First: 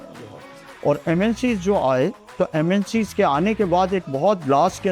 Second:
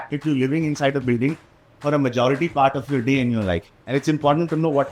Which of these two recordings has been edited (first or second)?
second